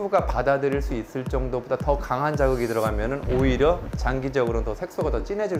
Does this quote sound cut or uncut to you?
uncut